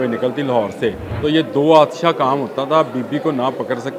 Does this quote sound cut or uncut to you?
cut